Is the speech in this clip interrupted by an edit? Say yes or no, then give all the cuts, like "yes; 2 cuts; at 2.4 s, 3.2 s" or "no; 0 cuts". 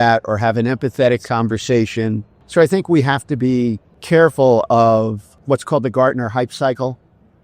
yes; 3 cuts; at 2.3 s, 3.9 s, 5.3 s